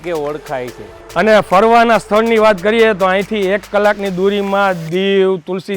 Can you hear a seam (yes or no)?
yes